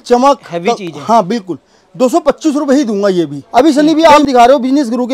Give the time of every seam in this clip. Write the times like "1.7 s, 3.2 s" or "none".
3.4 s